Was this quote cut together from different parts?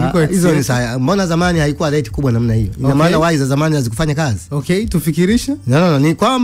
no; 0 cuts

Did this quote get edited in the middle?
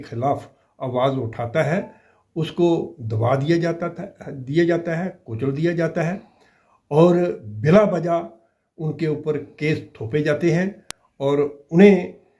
no; 0 cuts

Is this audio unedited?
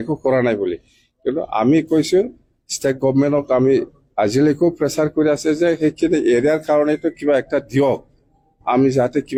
yes; 0 cuts

